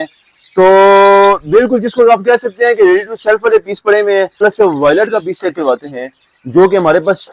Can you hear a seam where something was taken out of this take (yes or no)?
yes